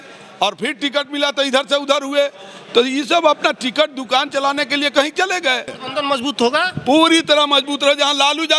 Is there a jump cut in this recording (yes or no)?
yes